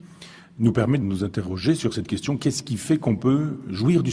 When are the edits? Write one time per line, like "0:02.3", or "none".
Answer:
none